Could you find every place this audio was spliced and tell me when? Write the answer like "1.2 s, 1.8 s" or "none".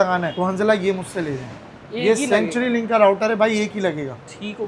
none